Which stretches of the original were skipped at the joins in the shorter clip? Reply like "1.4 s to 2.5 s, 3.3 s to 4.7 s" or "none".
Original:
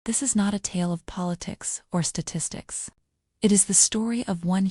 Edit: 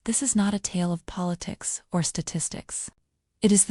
none